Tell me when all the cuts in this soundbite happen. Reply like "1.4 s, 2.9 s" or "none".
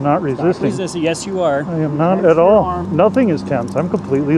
2.8 s